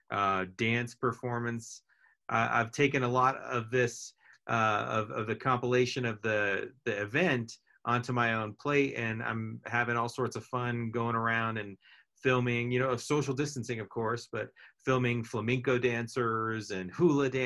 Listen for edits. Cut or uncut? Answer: uncut